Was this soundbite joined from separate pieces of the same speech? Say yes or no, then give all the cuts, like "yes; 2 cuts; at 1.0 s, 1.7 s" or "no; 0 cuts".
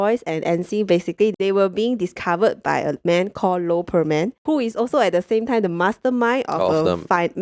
no; 0 cuts